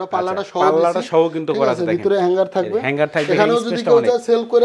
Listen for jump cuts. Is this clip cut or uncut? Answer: uncut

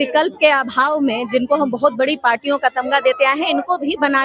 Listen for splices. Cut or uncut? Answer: uncut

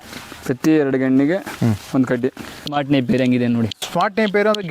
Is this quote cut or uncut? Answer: cut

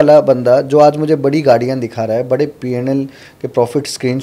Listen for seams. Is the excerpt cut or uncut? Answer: uncut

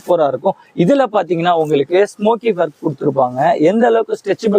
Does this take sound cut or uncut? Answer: uncut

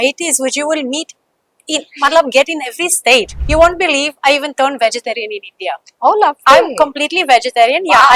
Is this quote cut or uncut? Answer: cut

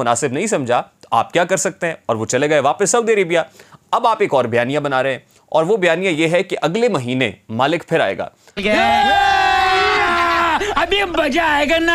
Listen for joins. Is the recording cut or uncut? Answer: uncut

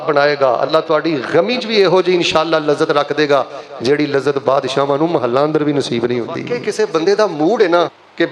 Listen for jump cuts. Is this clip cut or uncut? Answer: cut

